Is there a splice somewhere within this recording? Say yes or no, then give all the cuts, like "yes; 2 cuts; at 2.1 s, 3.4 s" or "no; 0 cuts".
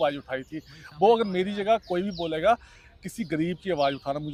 no; 0 cuts